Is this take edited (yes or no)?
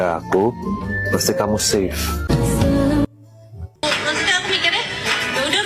yes